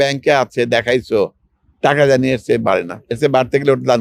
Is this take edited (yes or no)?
no